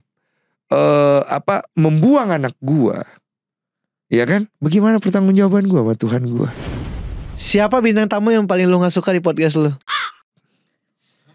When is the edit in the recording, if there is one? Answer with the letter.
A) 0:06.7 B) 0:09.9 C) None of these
A